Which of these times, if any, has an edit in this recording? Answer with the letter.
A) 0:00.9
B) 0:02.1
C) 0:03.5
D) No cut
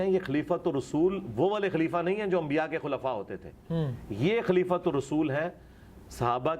D